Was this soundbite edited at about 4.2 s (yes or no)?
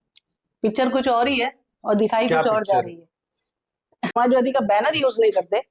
yes